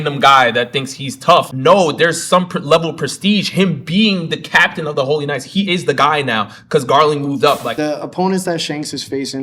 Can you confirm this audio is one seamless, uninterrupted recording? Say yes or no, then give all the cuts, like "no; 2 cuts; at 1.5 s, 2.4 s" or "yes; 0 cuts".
no; 1 cut; at 7.7 s